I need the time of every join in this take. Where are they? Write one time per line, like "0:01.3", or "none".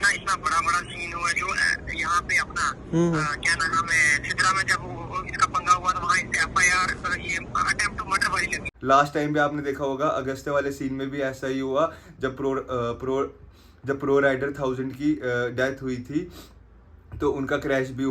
0:08.6